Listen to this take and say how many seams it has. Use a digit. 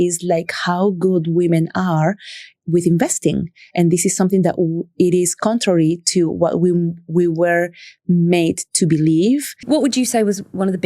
1